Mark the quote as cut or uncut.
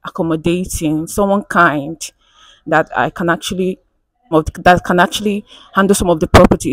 cut